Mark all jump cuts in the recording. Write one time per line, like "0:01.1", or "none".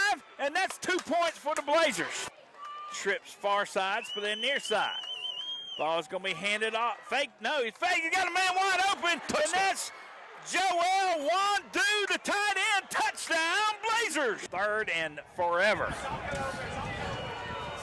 0:02.3
0:14.4